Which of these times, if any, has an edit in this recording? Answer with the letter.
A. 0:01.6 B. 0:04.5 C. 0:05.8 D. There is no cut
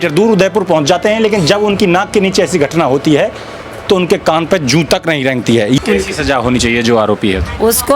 C